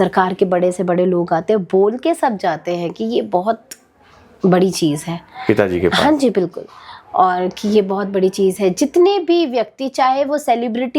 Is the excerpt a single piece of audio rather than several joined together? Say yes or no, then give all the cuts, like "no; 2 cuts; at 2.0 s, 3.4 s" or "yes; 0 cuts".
yes; 0 cuts